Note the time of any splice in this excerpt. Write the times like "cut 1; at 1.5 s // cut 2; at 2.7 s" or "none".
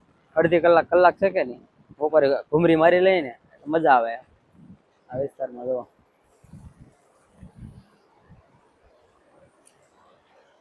none